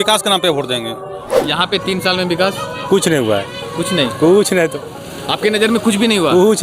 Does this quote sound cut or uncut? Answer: cut